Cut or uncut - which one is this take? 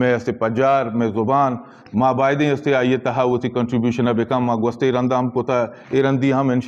uncut